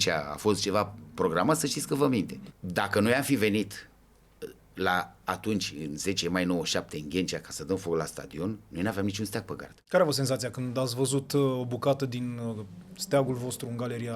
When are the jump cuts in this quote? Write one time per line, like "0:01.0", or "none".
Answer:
0:02.4
0:09.7